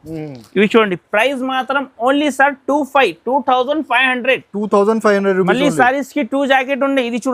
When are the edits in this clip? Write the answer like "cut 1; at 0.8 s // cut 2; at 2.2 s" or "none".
none